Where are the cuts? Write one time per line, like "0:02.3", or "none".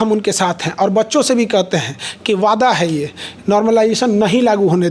none